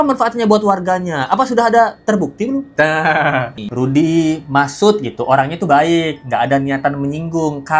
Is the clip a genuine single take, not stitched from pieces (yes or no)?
no